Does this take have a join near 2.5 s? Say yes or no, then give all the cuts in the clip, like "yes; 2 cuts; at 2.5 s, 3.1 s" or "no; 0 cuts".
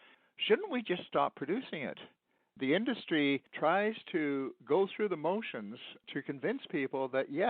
yes; 2 cuts; at 2.5 s, 3.5 s